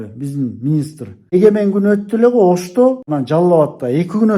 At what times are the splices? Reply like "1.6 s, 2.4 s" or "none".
1.3 s, 3.0 s